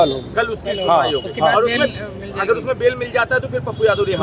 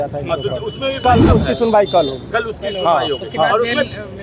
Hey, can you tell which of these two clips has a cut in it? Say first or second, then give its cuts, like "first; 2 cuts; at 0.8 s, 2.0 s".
second; 1 cut; at 1.0 s